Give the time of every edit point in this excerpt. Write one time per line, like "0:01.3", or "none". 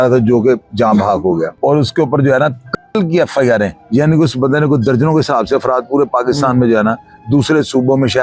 0:01.5
0:03.8